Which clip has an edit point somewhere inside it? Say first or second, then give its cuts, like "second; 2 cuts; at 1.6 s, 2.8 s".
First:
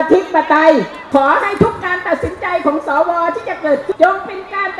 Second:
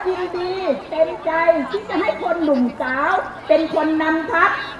first; 2 cuts; at 1.0 s, 3.9 s